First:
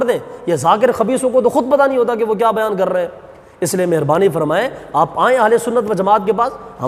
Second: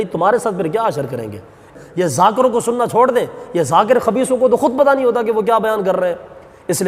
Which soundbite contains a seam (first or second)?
second